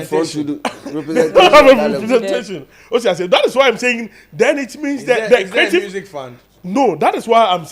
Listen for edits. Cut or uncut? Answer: uncut